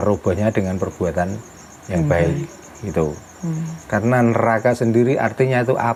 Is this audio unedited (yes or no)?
yes